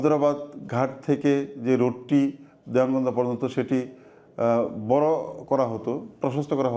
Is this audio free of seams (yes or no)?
yes